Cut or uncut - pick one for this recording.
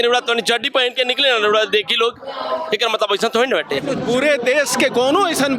cut